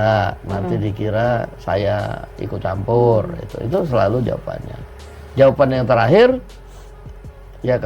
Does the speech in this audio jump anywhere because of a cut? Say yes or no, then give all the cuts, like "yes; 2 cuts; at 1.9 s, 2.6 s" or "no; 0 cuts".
no; 0 cuts